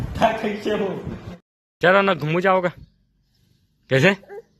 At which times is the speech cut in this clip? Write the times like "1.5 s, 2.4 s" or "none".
1.4 s

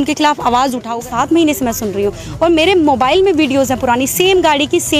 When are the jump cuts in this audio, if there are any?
1.0 s

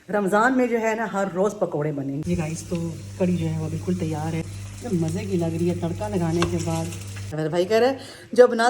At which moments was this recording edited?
2.2 s, 4.5 s, 7.3 s

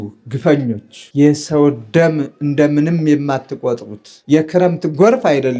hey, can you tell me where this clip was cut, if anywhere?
none

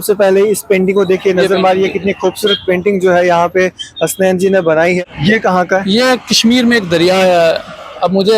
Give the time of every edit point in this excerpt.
5.0 s

